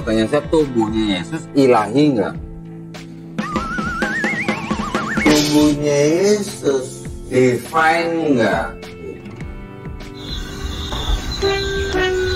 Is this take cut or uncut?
uncut